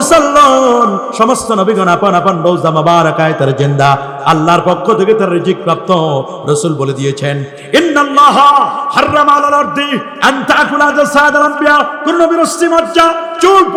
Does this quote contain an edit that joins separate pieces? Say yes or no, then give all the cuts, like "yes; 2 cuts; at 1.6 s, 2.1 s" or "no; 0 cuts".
no; 0 cuts